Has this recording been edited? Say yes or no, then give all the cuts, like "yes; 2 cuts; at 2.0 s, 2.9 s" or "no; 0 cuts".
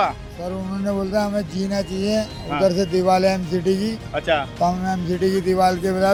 no; 0 cuts